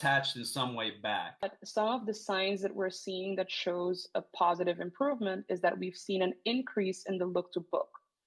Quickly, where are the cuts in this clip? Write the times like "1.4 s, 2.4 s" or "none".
1.5 s